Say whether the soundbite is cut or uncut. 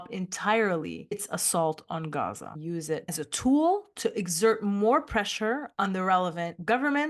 cut